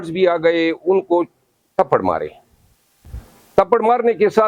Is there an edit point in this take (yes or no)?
no